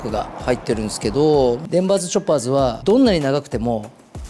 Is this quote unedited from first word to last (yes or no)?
no